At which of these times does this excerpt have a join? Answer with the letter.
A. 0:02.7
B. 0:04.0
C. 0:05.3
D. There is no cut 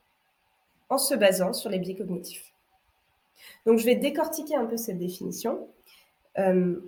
D